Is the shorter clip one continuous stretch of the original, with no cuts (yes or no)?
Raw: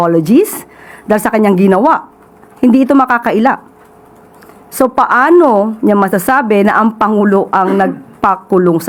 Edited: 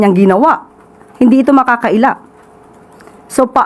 yes